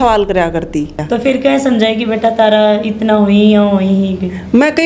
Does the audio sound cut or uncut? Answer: cut